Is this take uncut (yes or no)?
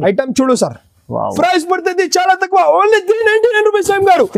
no